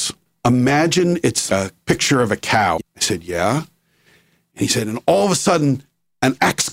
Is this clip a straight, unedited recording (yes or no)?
no